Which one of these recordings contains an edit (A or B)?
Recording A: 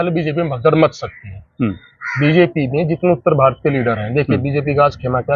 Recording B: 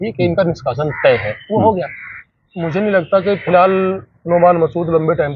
B